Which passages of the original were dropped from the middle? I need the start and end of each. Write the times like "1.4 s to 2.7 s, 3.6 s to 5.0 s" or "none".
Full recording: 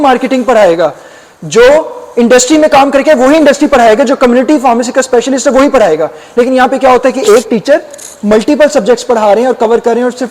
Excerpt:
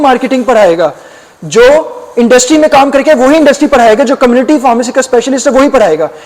none